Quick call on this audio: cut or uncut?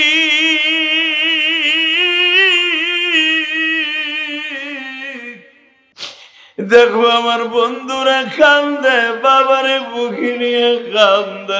cut